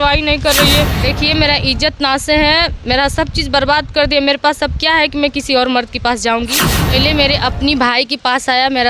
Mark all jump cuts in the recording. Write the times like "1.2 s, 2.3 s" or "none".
1.0 s, 6.9 s